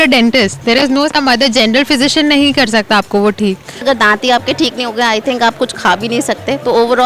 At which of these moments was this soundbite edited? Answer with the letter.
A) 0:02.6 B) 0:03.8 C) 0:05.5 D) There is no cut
B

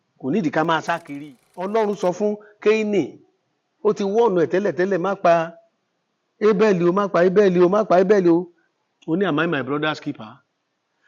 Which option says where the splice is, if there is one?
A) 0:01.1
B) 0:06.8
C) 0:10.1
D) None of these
A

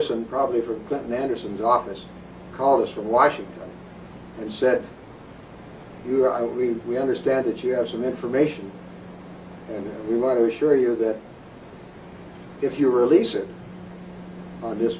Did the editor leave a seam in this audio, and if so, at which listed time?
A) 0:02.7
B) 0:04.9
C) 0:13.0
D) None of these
C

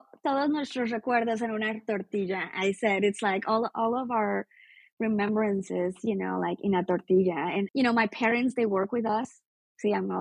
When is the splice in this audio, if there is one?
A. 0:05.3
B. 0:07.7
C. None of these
B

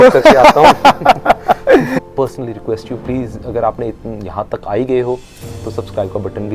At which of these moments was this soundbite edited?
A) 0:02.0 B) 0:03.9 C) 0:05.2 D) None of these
A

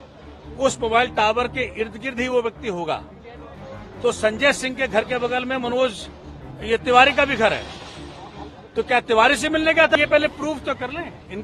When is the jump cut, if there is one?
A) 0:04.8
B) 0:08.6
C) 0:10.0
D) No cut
C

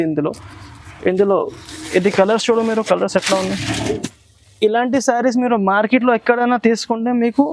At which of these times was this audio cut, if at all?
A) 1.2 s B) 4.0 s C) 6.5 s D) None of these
B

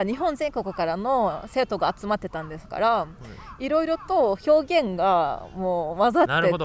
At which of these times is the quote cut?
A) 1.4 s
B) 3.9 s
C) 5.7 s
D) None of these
D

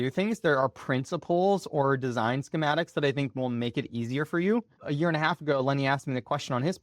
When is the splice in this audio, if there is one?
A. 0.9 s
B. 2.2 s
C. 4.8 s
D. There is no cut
C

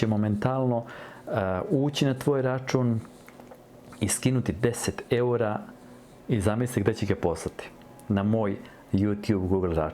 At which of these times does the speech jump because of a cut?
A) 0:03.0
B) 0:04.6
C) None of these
C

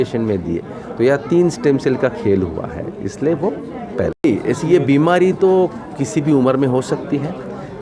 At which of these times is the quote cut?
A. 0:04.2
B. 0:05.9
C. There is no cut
A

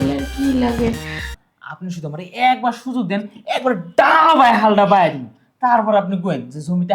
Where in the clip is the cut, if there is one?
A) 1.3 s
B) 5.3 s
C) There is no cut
A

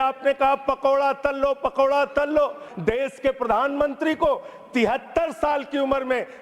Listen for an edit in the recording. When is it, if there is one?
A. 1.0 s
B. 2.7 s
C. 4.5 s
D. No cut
D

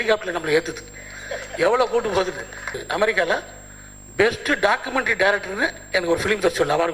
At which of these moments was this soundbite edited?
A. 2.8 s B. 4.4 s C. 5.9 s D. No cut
A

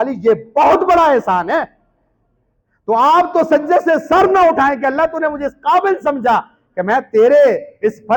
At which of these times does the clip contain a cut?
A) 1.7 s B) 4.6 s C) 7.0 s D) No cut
D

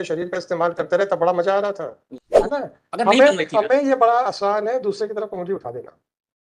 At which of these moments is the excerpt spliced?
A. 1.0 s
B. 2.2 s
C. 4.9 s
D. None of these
B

